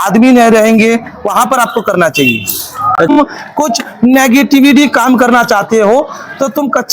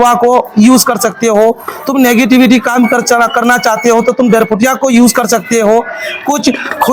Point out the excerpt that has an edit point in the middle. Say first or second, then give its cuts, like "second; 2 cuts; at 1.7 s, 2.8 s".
first; 1 cut; at 3.1 s